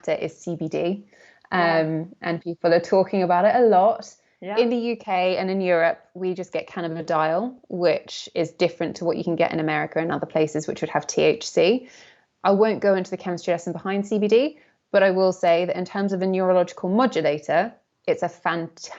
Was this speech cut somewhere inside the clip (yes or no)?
no